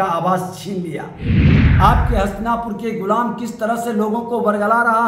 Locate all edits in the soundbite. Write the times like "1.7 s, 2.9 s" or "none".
1.5 s